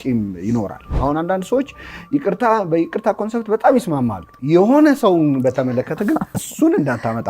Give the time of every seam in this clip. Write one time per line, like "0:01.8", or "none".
0:00.9